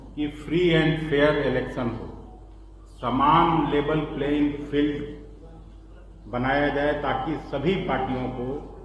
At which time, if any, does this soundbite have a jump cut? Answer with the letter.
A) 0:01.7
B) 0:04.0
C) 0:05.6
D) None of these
D